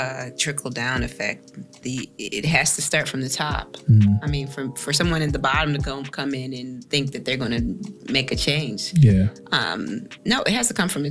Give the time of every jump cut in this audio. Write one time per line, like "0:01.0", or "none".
none